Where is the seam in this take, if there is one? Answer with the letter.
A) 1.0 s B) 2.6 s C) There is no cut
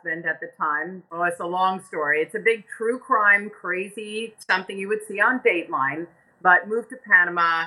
A